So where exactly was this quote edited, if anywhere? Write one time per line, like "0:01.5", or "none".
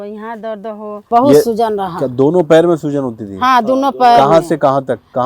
0:01.0